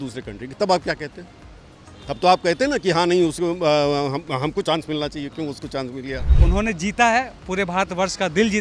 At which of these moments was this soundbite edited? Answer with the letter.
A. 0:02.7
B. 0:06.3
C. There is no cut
B